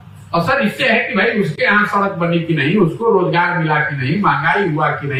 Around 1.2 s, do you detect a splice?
no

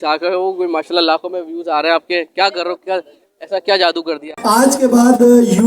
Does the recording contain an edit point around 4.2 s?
yes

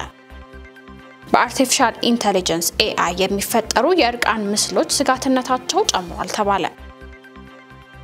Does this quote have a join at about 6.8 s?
yes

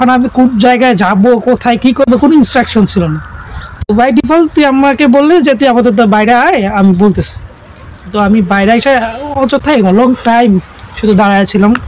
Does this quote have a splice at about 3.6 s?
no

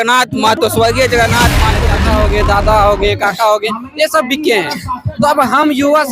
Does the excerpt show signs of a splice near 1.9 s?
yes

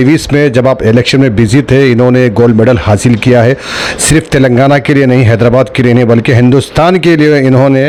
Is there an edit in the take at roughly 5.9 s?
no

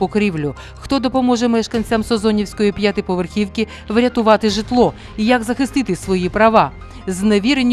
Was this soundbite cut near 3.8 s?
no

